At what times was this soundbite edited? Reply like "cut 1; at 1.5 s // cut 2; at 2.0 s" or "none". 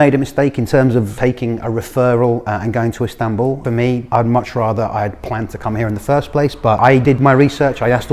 cut 1; at 1.1 s // cut 2; at 3.8 s // cut 3; at 7.0 s